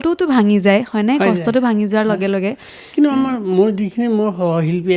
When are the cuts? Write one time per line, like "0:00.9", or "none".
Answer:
none